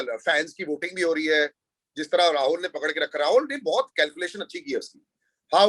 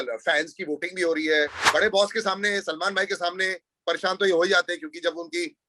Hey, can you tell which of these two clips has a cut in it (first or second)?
second